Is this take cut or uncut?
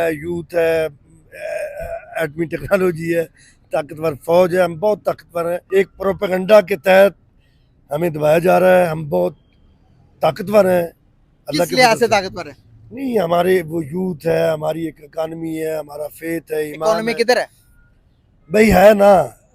cut